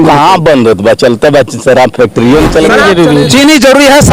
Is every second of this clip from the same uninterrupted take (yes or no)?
no